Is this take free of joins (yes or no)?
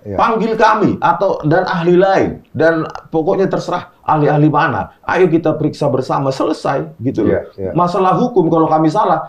yes